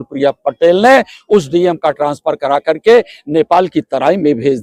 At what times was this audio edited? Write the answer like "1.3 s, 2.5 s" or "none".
none